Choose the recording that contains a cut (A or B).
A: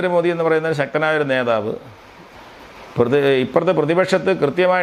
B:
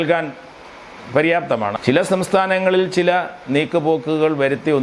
B